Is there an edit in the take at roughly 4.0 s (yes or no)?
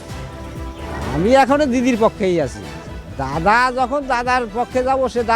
no